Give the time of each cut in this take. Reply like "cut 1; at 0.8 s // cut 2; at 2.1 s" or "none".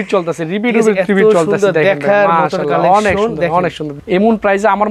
cut 1; at 3.9 s